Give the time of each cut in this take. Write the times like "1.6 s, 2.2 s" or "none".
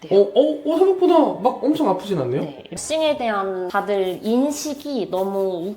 2.7 s